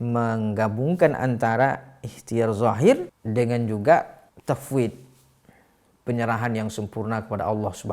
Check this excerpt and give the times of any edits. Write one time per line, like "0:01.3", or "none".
0:03.2
0:04.2